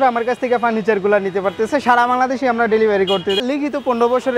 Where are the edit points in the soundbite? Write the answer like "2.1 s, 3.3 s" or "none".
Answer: 3.4 s